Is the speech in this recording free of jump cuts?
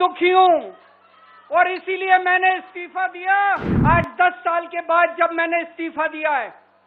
no; 1 cut; at 3.7 s

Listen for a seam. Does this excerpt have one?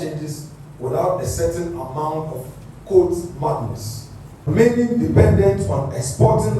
yes; 1 cut; at 4.5 s

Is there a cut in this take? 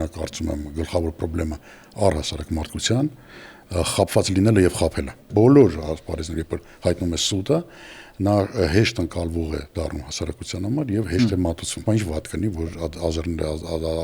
yes; 2 cuts; at 5.2 s, 11.8 s

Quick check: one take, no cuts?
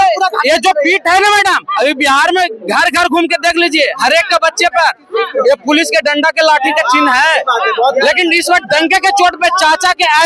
yes; 0 cuts

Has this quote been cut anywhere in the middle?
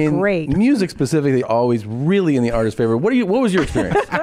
yes; 1 cut; at 1.5 s

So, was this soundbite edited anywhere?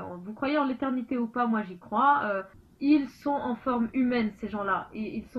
yes; 1 cut; at 2.5 s

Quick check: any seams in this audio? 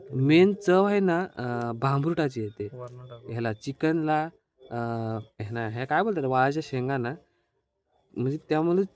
no; 0 cuts

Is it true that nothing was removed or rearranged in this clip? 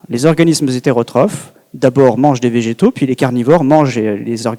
yes; 0 cuts

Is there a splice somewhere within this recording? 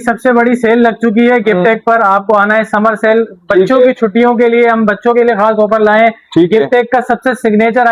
no; 0 cuts

